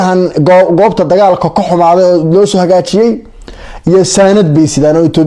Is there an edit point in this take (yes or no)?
no